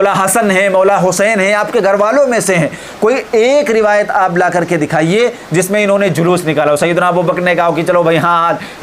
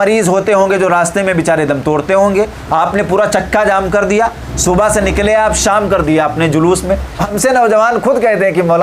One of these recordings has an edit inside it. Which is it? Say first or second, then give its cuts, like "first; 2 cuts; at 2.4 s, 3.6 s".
second; 1 cut; at 7.3 s